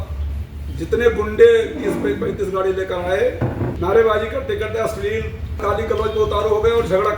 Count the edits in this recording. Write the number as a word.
two